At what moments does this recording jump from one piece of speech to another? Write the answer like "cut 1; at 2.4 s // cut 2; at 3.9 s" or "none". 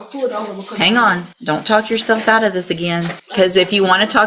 cut 1; at 1.3 s // cut 2; at 3.2 s

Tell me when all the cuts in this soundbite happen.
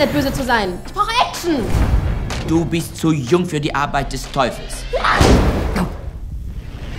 none

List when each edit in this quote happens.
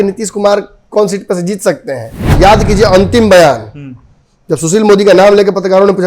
cut 1; at 2.2 s

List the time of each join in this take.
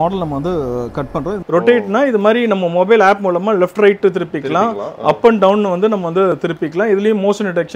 cut 1; at 1.4 s

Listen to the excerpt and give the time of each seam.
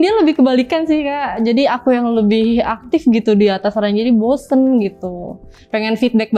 none

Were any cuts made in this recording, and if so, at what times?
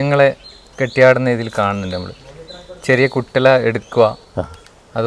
none

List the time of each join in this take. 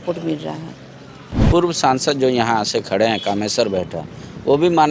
cut 1; at 1.4 s

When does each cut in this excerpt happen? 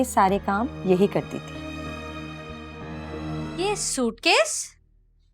cut 1; at 3.5 s

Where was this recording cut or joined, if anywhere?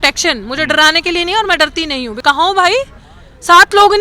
cut 1; at 2.1 s

